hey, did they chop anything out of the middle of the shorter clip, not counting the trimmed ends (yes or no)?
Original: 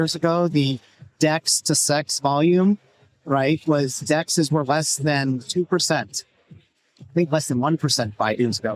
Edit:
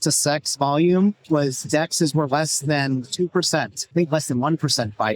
yes